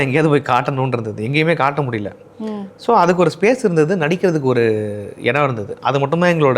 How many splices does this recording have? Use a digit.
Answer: 0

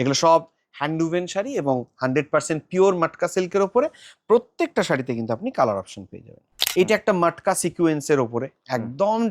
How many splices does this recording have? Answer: 1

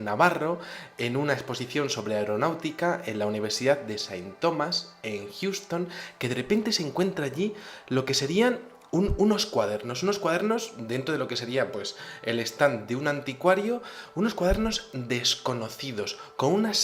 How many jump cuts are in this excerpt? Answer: 1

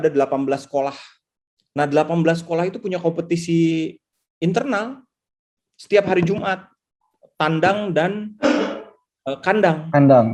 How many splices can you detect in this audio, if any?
0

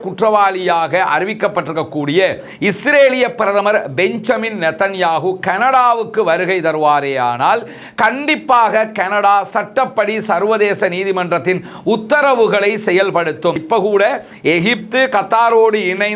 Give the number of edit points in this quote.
1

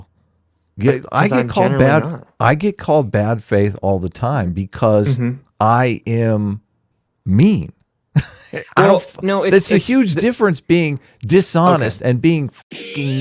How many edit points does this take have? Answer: 0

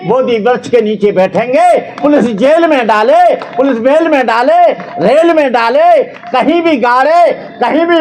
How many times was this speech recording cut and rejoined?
0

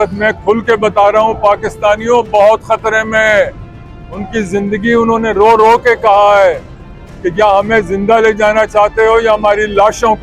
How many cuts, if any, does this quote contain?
0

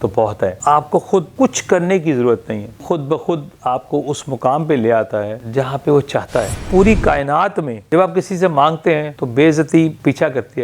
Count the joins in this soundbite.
1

